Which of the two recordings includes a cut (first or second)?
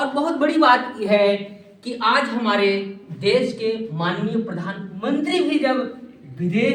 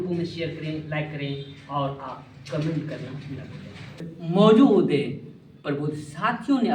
second